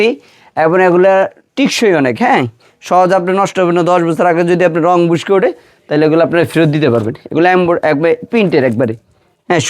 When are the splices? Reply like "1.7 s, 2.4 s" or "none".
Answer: none

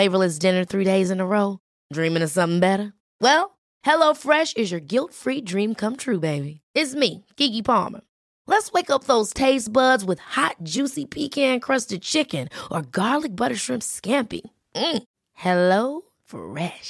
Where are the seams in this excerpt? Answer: none

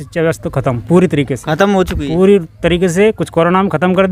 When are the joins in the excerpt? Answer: none

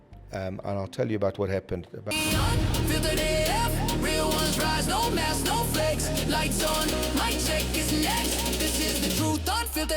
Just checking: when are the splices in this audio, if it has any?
2.0 s

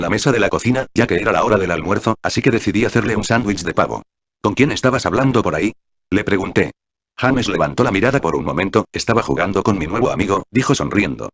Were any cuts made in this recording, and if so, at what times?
8.2 s

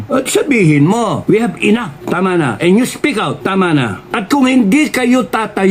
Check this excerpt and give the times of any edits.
1.2 s, 1.9 s, 3.4 s, 4.0 s

